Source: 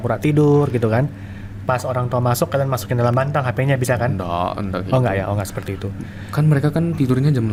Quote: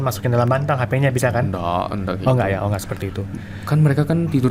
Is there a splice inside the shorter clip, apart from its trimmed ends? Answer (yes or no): no